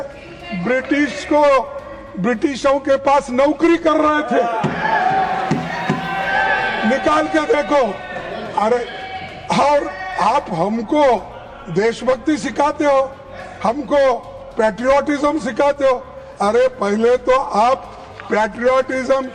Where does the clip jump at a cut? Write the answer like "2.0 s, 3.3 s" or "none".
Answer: none